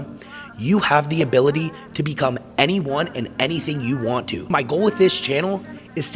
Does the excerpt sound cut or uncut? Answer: cut